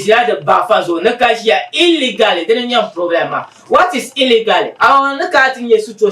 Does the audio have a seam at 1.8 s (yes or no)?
no